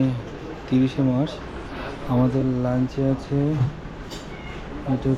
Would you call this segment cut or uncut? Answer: uncut